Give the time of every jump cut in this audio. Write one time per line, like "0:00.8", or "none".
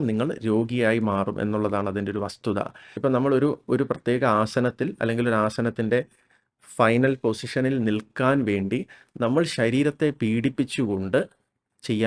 0:02.8